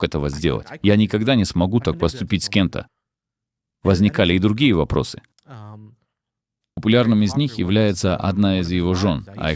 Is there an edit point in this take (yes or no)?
no